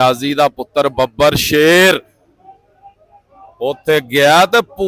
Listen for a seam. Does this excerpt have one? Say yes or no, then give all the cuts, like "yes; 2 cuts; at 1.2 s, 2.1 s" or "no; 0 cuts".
no; 0 cuts